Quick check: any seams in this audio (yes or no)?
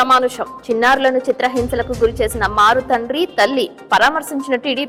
no